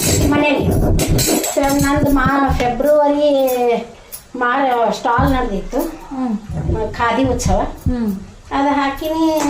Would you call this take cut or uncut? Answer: uncut